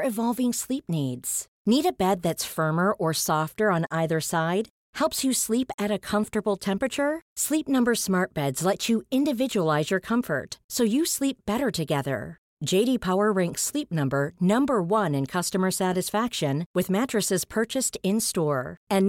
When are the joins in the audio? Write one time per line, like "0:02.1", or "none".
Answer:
none